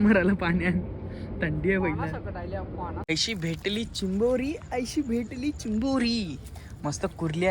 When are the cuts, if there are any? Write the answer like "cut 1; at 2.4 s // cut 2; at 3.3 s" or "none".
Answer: cut 1; at 3.0 s